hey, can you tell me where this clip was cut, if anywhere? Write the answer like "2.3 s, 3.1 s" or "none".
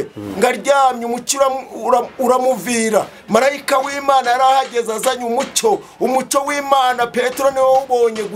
none